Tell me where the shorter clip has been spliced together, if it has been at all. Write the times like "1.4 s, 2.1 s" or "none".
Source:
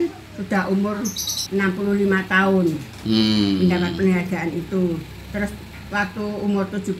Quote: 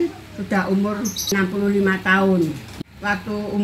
1.2 s, 2.7 s